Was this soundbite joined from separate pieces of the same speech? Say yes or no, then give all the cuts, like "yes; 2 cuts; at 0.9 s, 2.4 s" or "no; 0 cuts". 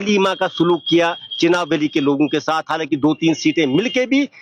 no; 0 cuts